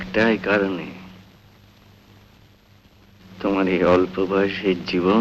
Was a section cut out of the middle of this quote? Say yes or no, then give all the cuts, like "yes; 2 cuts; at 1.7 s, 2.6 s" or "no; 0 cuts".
no; 0 cuts